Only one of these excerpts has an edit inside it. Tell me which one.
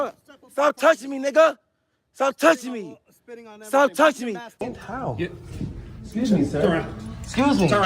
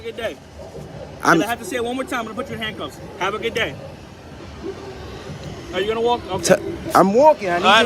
first; 1 cut; at 4.6 s

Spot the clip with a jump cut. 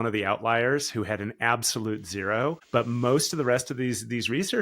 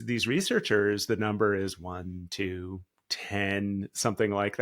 first; 1 cut; at 2.6 s

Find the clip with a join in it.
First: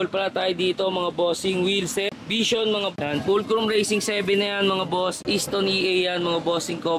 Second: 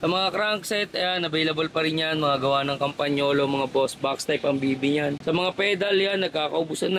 first; 2 cuts; at 2.9 s, 5.2 s

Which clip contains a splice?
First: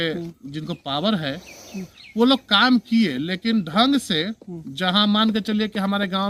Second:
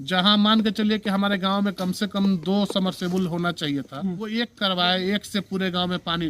second; 1 cut; at 4.2 s

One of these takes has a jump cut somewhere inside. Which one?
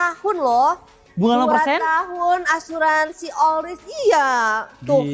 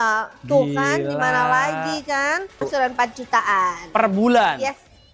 second; 1 cut; at 2.6 s

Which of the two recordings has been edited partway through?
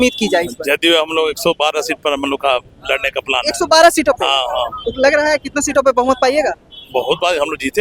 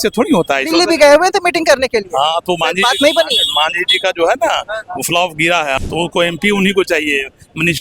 second; 1 cut; at 5.8 s

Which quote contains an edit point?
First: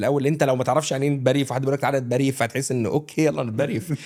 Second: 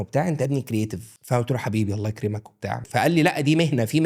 second; 2 cuts; at 1.1 s, 2.8 s

